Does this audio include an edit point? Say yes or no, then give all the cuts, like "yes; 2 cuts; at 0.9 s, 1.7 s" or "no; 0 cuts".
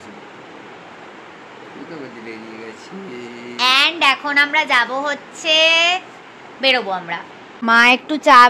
no; 0 cuts